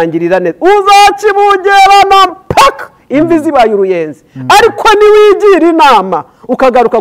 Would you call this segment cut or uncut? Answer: uncut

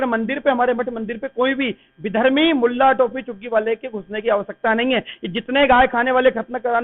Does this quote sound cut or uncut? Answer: uncut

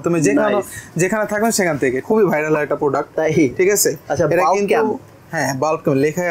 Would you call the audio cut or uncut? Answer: cut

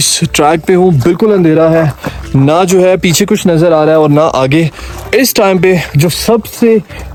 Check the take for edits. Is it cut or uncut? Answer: uncut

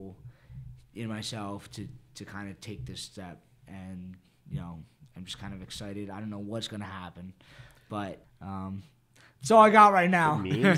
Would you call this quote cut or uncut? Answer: cut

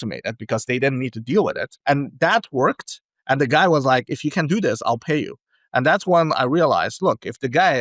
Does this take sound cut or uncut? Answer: cut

